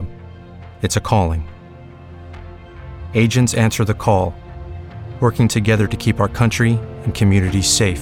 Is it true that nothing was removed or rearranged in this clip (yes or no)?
yes